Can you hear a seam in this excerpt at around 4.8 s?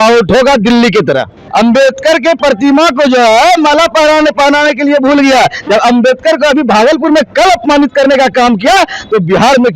no; 1 cut; at 1.4 s

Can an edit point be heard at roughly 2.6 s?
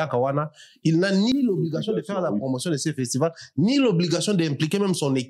no; 1 cut; at 1.3 s

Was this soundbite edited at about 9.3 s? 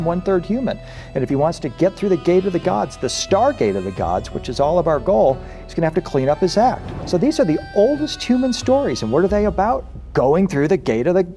no; 1 cut; at 6.9 s

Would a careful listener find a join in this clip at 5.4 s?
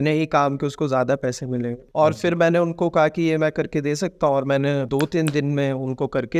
no; 1 cut; at 1.8 s

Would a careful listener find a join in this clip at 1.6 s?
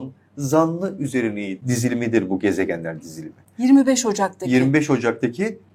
yes; 1 cut; at 1.6 s

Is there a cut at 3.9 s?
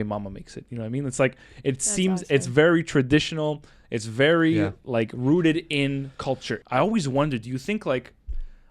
no; 1 cut; at 6.5 s

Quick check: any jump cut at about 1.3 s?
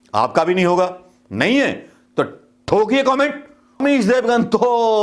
no; 1 cut; at 3.8 s

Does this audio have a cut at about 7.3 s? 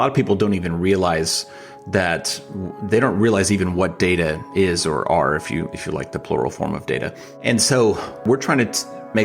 yes; 2 cuts; at 7.3 s, 8.2 s

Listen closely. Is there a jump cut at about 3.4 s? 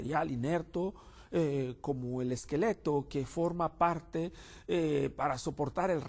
no; 0 cuts

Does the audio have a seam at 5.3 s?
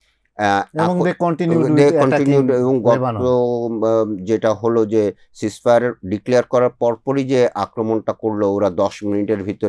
no; 0 cuts

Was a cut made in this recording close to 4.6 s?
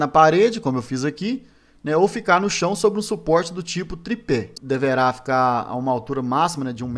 yes; 1 cut; at 4.6 s

